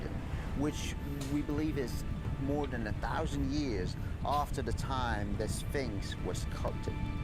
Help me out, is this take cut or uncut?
cut